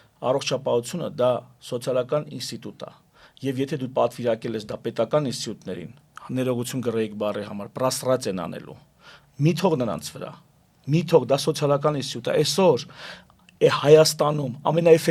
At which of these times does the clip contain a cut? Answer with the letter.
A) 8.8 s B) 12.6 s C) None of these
C